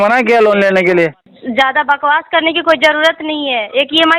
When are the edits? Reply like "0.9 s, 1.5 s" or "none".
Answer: 1.3 s